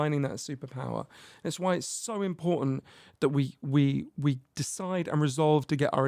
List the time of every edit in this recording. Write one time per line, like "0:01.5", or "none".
none

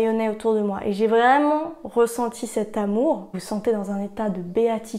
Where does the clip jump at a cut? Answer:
0:03.3

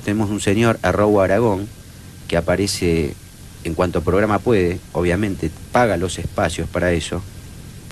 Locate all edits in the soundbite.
none

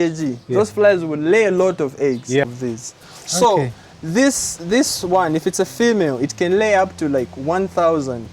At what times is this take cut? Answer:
0:02.4

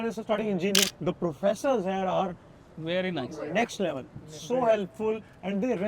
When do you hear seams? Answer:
0:00.9

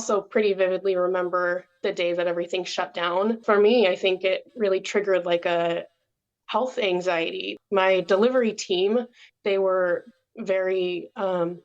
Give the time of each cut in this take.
0:03.4
0:07.5

